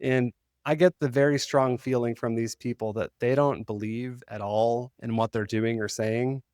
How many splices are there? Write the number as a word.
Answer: zero